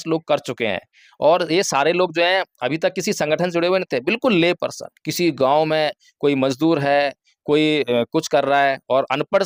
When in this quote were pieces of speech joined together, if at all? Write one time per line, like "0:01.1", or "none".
none